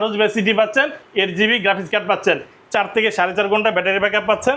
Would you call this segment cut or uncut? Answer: uncut